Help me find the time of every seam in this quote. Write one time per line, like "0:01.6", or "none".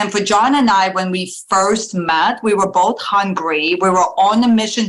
none